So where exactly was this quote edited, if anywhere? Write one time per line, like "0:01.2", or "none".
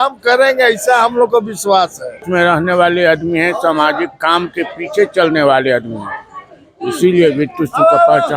0:02.2